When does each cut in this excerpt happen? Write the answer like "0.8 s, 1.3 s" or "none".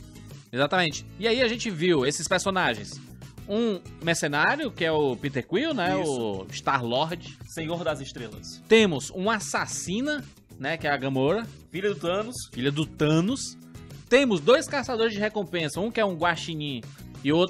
1.0 s